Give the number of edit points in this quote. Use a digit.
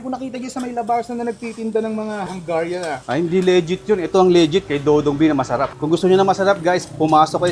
1